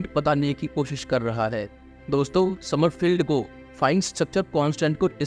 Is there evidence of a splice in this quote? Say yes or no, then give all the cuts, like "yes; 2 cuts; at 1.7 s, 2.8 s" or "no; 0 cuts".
no; 0 cuts